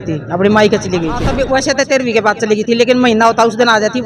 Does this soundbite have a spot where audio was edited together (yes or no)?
yes